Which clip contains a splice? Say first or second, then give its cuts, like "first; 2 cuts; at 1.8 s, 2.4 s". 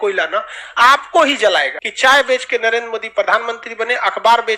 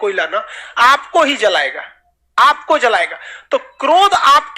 first; 1 cut; at 1.8 s